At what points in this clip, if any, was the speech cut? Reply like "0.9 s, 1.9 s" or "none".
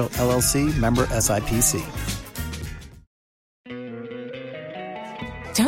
3.7 s